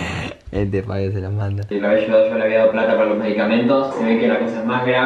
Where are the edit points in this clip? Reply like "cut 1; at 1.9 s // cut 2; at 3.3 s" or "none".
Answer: cut 1; at 1.6 s